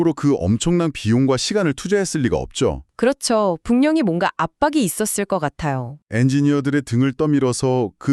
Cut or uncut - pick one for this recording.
uncut